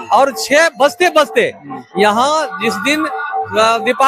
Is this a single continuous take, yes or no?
yes